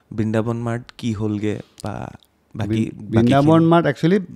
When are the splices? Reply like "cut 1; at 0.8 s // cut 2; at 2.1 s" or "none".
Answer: none